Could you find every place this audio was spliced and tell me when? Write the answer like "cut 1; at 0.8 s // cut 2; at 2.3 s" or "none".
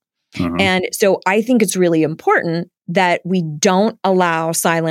none

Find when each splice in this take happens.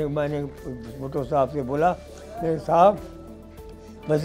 none

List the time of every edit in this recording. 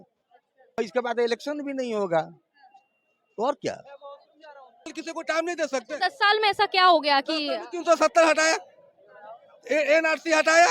cut 1; at 0.8 s // cut 2; at 5.0 s

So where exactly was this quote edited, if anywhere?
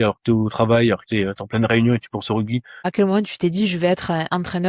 cut 1; at 2.9 s

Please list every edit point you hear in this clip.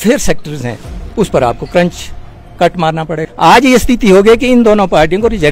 cut 1; at 3.3 s

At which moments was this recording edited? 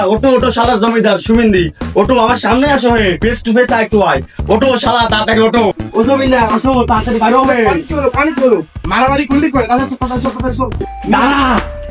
cut 1; at 10.9 s

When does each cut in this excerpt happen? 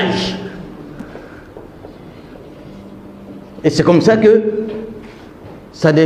none

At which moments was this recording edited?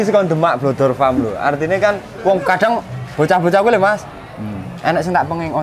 none

